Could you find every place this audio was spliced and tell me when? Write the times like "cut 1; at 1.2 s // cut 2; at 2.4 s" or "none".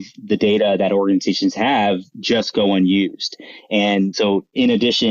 cut 1; at 4.1 s